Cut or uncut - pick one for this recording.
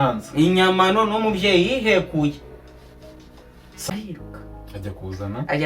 cut